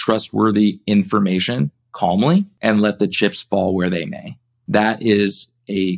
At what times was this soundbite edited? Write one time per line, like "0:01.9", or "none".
0:02.5

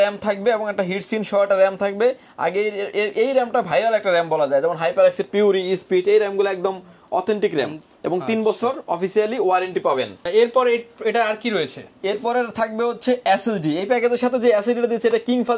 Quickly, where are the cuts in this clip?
none

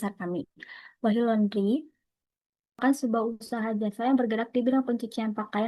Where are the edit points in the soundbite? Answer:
0:02.8

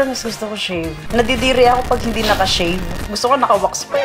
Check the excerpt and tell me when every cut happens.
0:01.0
0:02.9

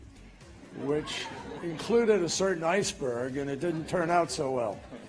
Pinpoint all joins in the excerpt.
0:03.8

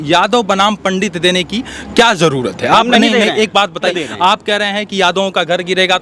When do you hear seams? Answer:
0:03.9

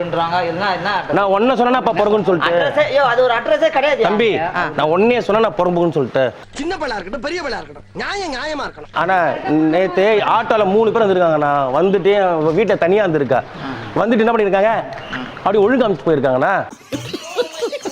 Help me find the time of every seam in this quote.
0:08.8

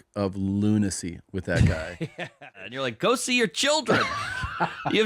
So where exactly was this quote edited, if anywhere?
0:02.2

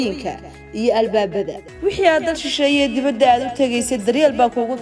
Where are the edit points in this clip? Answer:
0:01.6

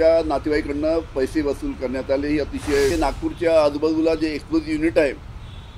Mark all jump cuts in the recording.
0:02.9

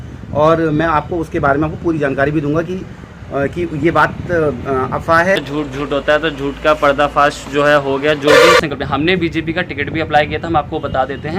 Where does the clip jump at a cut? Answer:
0:05.4
0:08.6

